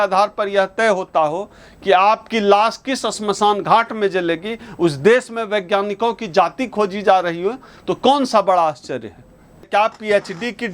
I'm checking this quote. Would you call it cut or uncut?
cut